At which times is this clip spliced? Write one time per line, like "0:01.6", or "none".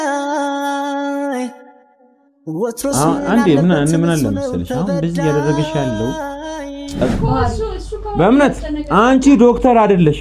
0:07.1